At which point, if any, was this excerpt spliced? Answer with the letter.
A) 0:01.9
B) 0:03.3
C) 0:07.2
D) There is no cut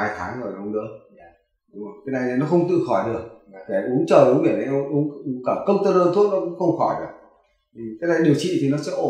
D